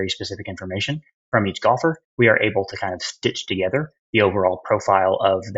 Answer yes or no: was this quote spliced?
yes